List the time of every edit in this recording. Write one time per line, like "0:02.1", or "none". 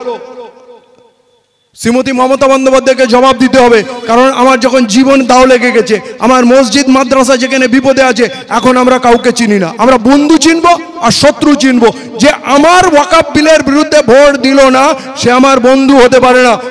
none